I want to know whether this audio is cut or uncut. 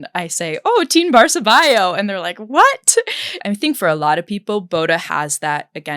cut